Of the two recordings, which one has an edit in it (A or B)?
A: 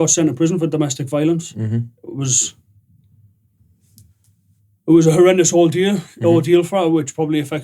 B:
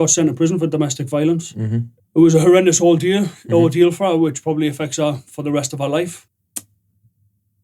B